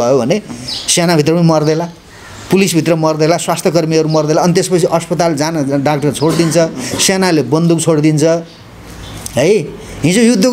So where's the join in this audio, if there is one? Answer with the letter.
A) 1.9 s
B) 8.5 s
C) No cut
C